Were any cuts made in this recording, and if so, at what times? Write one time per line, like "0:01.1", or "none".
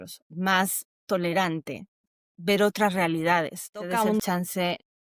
0:02.0
0:03.9